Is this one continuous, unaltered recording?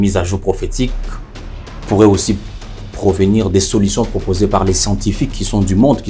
yes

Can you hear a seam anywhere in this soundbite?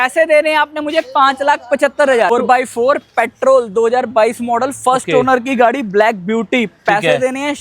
yes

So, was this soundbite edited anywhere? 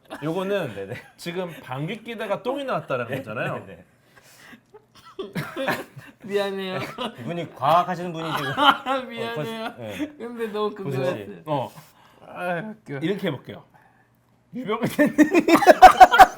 no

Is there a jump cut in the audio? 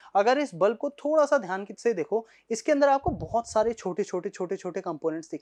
no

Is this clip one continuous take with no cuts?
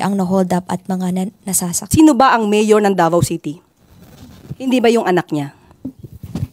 no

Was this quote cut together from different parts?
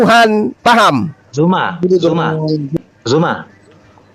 yes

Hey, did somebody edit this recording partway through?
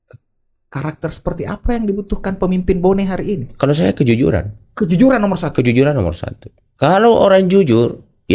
no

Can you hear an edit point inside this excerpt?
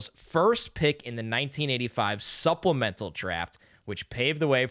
no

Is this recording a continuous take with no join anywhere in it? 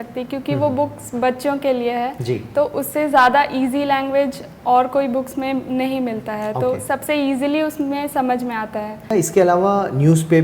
no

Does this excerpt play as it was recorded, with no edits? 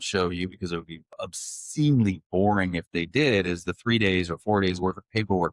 yes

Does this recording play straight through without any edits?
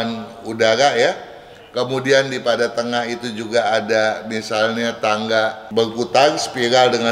no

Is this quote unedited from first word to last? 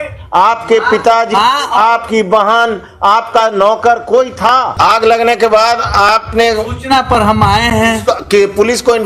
no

